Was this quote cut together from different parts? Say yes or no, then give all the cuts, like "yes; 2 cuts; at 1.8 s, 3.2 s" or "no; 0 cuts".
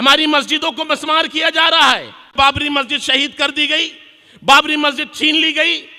yes; 1 cut; at 2.3 s